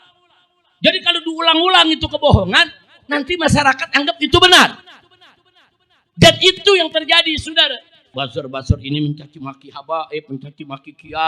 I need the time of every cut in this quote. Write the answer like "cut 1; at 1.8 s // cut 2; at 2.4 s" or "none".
cut 1; at 8.1 s